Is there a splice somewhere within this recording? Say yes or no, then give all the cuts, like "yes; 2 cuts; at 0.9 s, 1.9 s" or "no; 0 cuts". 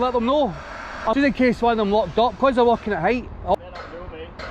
yes; 2 cuts; at 1.1 s, 3.5 s